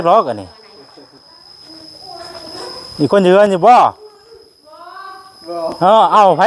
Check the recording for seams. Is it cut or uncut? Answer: uncut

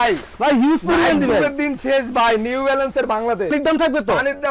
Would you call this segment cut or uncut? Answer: cut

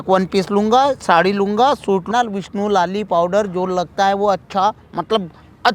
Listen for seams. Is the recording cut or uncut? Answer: cut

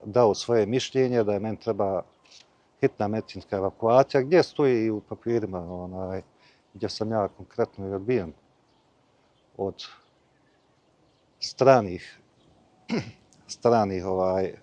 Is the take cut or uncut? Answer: uncut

